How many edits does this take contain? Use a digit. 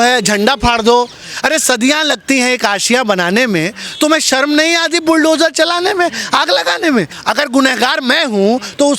2